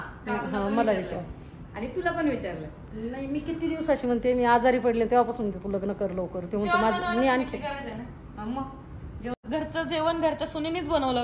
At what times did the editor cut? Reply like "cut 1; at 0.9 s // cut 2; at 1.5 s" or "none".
cut 1; at 9.4 s